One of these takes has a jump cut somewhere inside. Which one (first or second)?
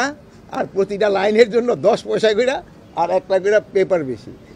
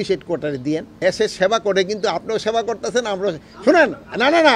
second